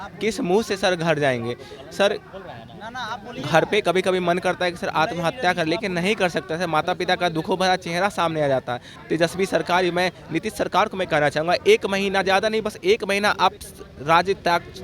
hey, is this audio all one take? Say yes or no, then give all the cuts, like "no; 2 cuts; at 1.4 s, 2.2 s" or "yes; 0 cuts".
no; 1 cut; at 9.0 s